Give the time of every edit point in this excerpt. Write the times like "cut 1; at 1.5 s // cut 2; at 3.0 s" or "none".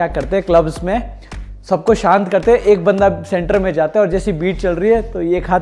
none